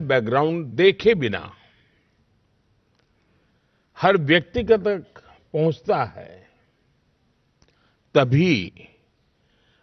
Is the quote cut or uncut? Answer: uncut